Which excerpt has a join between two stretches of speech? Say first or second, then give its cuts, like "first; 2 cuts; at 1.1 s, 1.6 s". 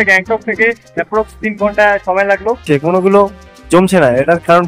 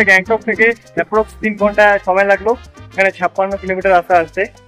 first; 1 cut; at 2.6 s